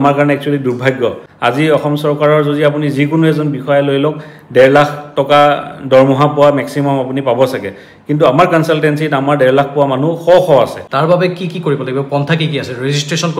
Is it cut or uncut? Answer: cut